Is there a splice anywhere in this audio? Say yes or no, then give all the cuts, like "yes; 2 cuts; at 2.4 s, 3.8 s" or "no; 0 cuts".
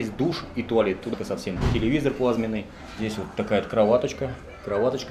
yes; 2 cuts; at 1.1 s, 2.9 s